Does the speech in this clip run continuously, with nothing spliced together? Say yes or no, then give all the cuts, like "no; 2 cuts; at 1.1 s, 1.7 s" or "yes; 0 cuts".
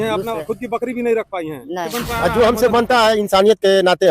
no; 1 cut; at 1.9 s